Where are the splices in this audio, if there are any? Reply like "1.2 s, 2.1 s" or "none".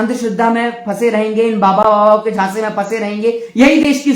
none

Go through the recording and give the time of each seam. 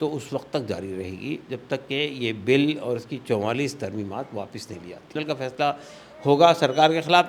5.1 s

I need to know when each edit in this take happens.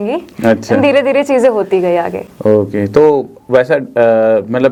none

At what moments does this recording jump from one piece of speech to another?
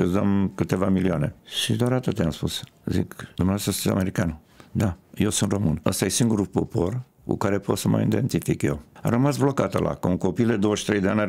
1.5 s, 3.2 s, 5.8 s, 8.9 s

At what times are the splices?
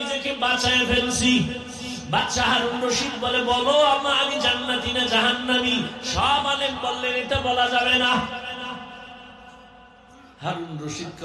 1.9 s

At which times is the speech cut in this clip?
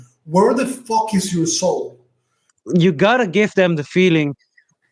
2.5 s

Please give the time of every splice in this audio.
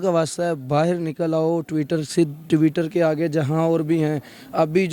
none

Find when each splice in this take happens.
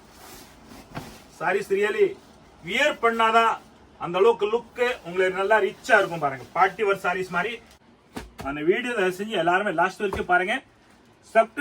7.7 s

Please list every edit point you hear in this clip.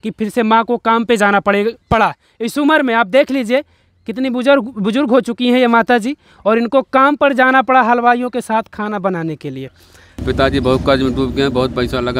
10.2 s

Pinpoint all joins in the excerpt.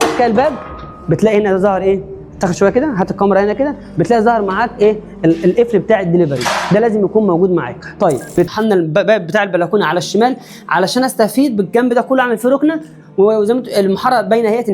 8.4 s

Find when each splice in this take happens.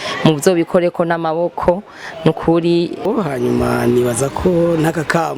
3.1 s

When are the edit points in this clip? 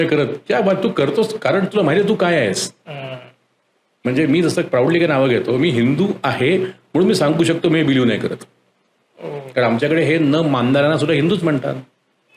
none

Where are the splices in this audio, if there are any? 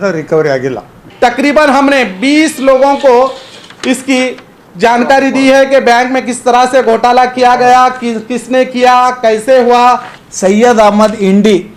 1.0 s, 10.1 s

